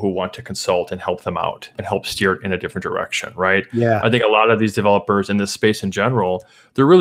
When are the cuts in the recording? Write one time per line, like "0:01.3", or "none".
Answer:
0:01.7

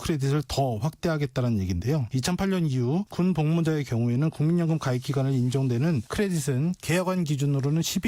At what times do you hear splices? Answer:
none

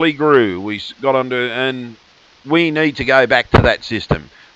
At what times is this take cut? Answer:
none

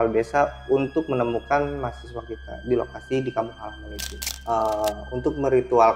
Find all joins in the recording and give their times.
0:04.3

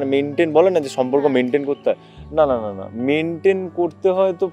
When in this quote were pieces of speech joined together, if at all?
none

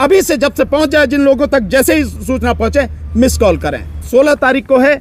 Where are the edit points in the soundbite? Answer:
0:04.1

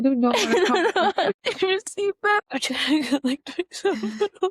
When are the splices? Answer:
0:01.3
0:02.5

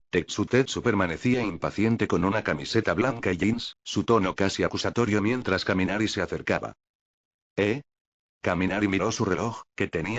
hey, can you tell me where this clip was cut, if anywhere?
none

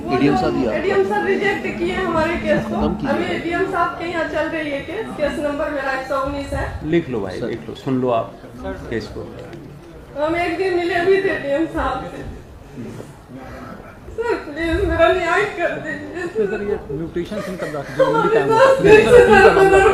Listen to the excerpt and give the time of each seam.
none

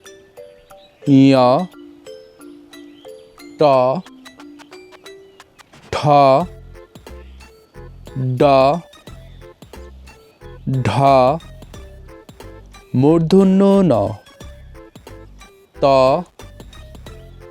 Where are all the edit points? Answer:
0:02.1
0:03.6
0:04.4
0:05.8
0:09.1
0:10.6

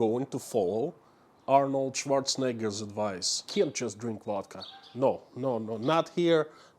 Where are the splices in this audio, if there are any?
0:03.5

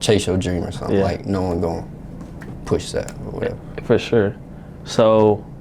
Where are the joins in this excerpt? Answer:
none

